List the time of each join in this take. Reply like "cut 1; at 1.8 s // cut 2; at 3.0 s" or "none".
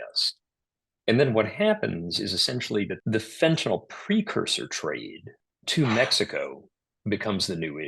cut 1; at 3.0 s